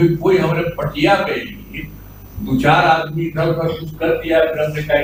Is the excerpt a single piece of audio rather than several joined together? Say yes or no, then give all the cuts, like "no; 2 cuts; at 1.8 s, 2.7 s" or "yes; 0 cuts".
yes; 0 cuts